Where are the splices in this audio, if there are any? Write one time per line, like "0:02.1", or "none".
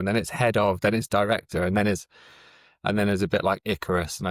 none